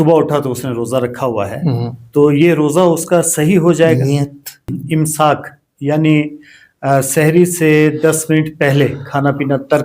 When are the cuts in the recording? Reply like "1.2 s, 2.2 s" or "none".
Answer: 4.8 s